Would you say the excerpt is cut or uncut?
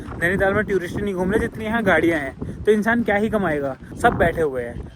cut